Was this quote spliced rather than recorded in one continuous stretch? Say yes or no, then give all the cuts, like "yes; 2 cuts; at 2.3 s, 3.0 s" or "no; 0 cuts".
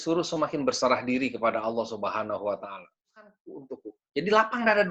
yes; 1 cut; at 3.5 s